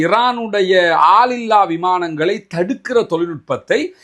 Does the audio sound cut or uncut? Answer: uncut